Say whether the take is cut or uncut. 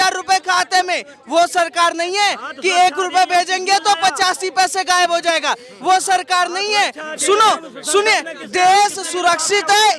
uncut